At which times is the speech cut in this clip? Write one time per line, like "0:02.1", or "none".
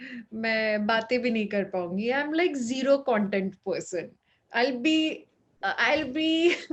none